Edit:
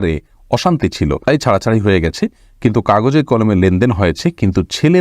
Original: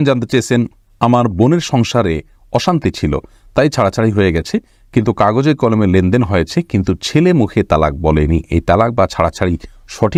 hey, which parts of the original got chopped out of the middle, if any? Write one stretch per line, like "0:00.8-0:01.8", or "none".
0:03.2-0:03.5